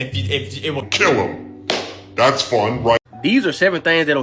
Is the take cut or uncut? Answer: cut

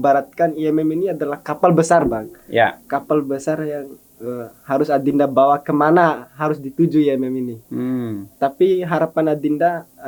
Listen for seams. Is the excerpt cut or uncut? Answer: uncut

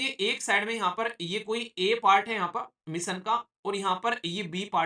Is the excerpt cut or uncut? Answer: uncut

